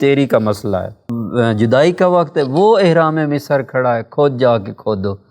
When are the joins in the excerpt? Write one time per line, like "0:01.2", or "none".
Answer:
0:00.9